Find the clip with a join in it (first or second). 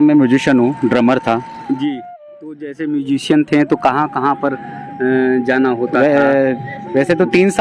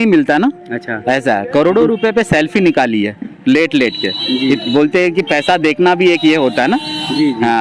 first